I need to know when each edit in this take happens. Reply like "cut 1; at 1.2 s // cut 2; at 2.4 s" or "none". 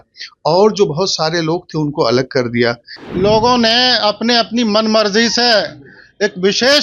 cut 1; at 2.9 s